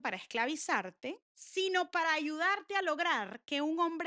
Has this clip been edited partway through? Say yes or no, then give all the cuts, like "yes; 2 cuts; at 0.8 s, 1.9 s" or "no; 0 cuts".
yes; 1 cut; at 1.3 s